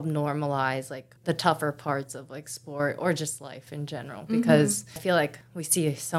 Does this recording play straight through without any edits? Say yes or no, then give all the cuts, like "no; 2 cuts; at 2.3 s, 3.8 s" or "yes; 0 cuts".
no; 2 cuts; at 1.0 s, 5.0 s